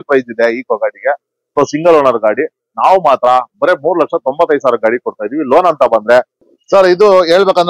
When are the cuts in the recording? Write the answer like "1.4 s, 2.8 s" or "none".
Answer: 6.4 s